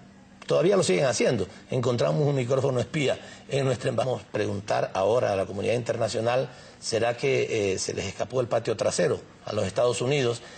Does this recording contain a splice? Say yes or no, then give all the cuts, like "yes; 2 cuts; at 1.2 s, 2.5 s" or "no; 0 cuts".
no; 0 cuts